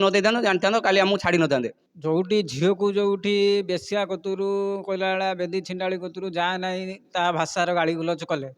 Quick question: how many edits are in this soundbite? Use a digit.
1